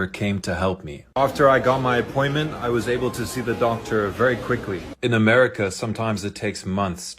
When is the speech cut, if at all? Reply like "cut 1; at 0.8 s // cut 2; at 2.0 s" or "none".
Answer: cut 1; at 1.0 s // cut 2; at 4.9 s // cut 3; at 5.5 s